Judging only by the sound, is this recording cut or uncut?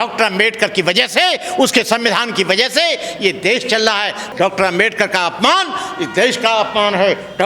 cut